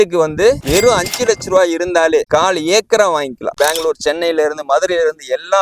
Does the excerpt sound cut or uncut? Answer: cut